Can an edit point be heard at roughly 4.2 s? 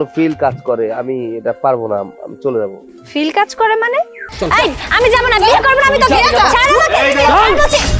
yes; 1 cut; at 4.2 s

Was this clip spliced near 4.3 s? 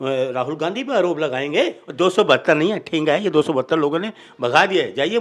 no; 1 cut; at 1.8 s

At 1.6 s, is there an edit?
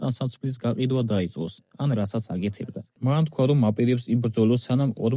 no; 1 cut; at 2.8 s

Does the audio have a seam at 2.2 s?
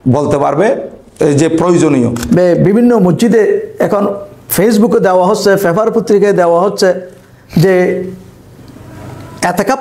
yes; 1 cut; at 2.2 s

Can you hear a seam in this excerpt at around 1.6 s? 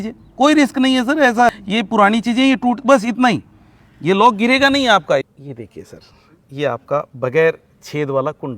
yes; 2 cuts; at 1.6 s, 5.3 s

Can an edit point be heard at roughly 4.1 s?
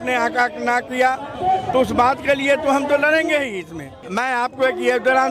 yes; 1 cut; at 4.1 s

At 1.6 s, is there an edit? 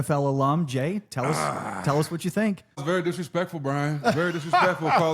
no; 1 cut; at 2.8 s

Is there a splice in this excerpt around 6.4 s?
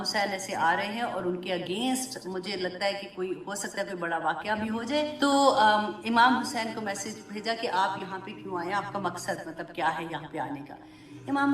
no; 1 cut; at 5.1 s

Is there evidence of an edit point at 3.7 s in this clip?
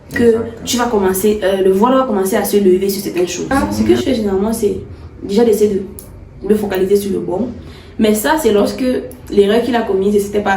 yes; 1 cut; at 3.7 s

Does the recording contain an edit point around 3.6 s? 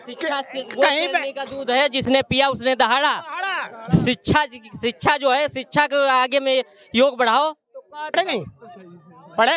no; 1 cut; at 8.2 s

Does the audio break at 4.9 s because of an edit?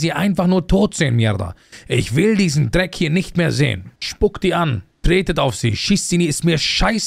yes; 2 cuts; at 3.9 s, 4.9 s

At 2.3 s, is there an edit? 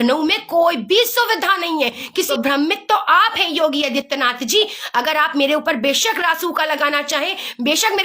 yes; 1 cut; at 2.3 s

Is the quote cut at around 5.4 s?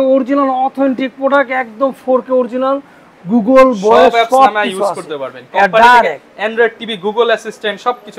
no; 0 cuts

